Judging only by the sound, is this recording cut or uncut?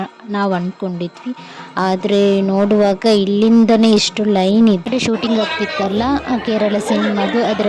cut